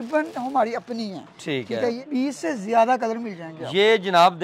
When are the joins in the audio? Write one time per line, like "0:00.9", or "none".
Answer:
0:02.0